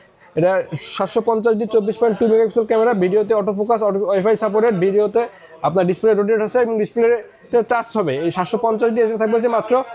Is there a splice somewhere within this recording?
no; 0 cuts

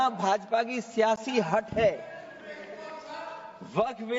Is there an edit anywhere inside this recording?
no; 0 cuts

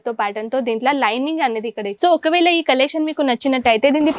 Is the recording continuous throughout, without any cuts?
no; 1 cut; at 1.9 s

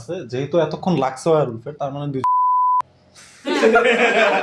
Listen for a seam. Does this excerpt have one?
no; 0 cuts

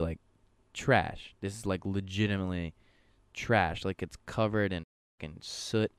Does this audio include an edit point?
no; 0 cuts

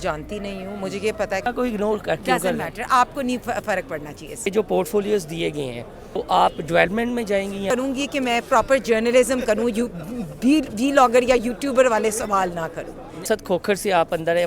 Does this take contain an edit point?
yes; 5 cuts; at 1.5 s, 4.5 s, 6.2 s, 7.7 s, 13.2 s

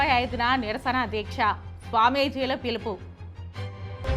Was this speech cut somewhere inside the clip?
no; 0 cuts

